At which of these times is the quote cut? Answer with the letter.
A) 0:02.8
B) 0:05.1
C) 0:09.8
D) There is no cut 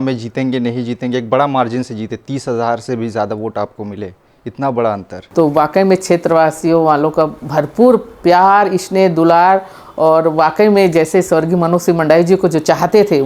B